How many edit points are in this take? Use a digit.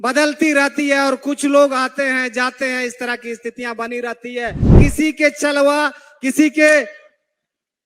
1